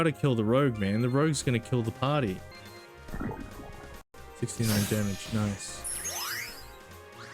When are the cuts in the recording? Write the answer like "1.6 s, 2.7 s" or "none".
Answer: 2.5 s, 4.0 s, 5.8 s